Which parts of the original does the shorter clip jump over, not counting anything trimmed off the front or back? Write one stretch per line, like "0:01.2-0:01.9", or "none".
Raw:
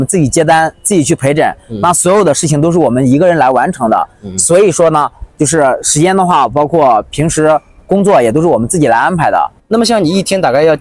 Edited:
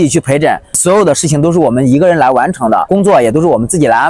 0:01.7-0:02.0
0:04.0-0:07.8